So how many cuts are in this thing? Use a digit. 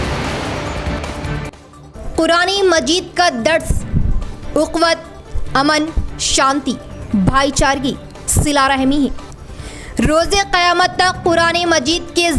1